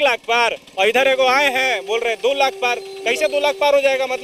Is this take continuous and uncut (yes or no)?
yes